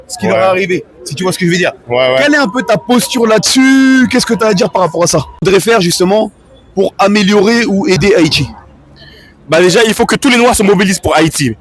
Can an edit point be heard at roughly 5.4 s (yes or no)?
yes